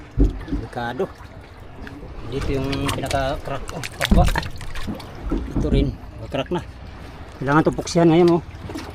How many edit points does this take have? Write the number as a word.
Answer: zero